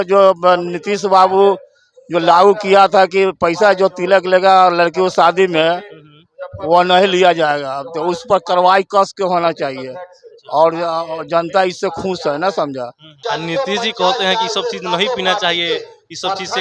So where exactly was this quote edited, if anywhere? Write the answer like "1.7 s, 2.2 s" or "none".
13.1 s